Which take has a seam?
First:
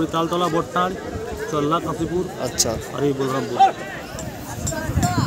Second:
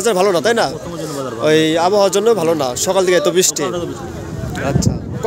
first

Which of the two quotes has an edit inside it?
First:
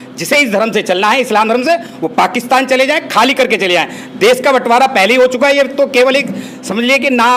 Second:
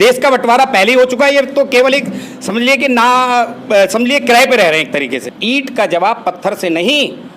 second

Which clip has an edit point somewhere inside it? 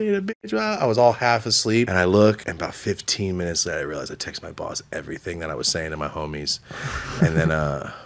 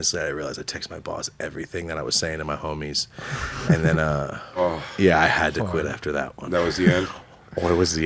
first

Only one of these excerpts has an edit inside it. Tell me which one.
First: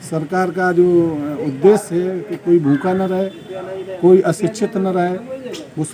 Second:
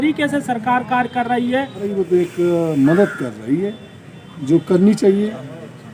second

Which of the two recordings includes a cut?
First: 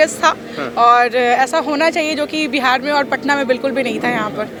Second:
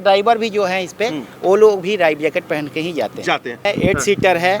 second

